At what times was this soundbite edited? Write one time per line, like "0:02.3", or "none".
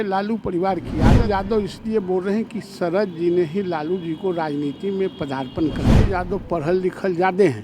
0:01.2
0:05.9